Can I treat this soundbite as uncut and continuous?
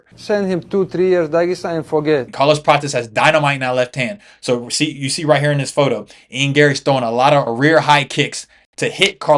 no; 1 cut; at 2.3 s

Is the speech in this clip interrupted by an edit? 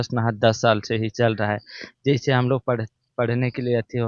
no; 0 cuts

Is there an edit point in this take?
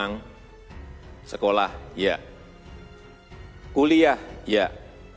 no; 0 cuts

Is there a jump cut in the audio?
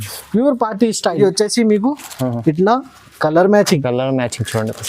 yes; 1 cut; at 1.2 s

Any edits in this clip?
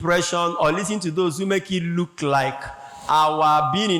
no; 0 cuts

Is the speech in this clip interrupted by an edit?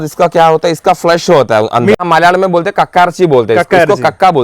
yes; 1 cut; at 1.9 s

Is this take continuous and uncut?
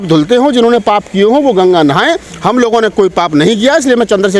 yes; 0 cuts

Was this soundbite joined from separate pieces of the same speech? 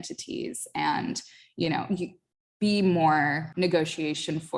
yes; 1 cut; at 3.4 s

